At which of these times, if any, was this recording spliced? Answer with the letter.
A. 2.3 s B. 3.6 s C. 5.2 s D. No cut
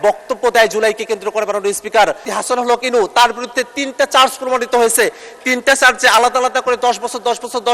A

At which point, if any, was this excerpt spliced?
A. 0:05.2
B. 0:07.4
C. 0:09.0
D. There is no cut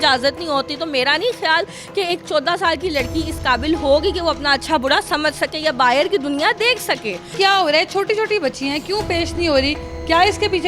B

